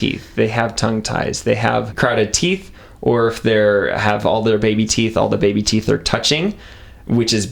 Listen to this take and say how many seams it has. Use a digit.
1